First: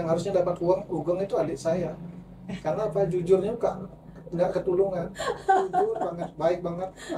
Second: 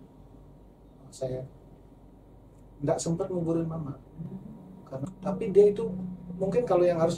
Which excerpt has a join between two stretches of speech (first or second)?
second